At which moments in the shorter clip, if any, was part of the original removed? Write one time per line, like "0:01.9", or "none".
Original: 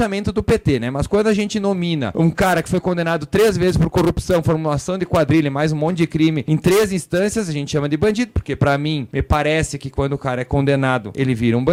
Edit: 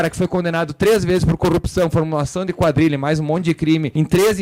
none